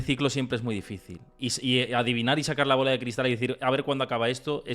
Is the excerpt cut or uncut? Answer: uncut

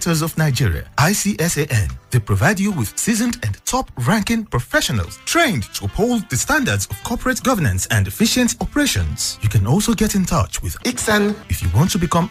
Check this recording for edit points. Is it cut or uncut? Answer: uncut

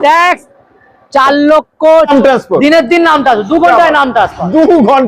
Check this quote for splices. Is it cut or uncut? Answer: cut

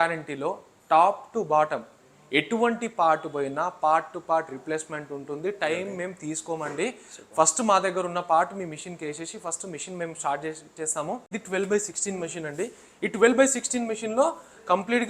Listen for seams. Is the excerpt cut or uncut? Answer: cut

